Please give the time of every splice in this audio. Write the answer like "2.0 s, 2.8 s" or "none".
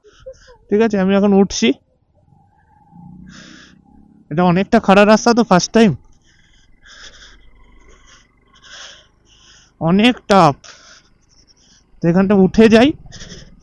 none